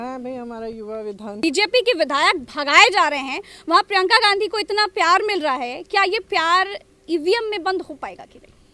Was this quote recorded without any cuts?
no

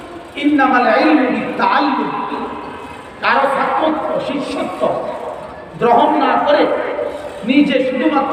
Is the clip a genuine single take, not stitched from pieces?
yes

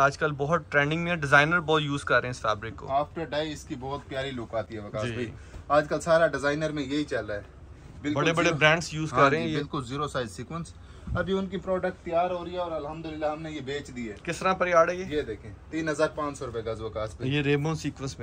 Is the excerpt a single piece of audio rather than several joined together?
yes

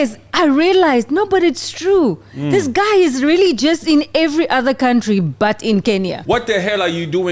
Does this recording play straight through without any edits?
no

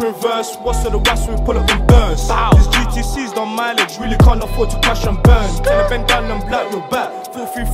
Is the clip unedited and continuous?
yes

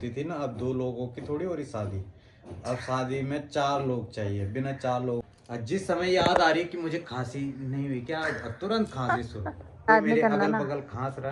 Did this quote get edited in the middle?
yes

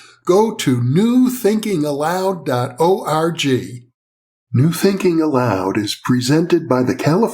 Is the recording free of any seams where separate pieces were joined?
no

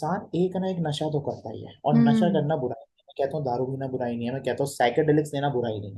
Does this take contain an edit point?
no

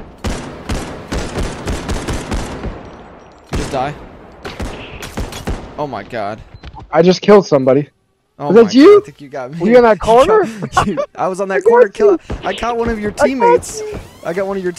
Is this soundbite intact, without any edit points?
yes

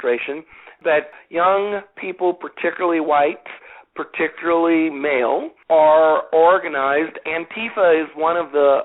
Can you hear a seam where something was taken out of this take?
yes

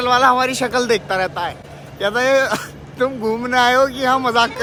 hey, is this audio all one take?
yes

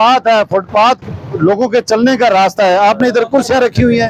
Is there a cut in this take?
no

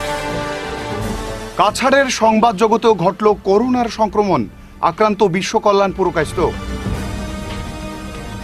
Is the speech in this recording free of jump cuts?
yes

